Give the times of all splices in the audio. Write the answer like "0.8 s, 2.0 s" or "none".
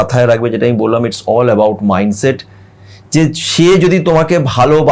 none